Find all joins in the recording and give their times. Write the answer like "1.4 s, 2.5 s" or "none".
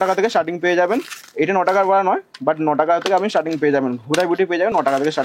none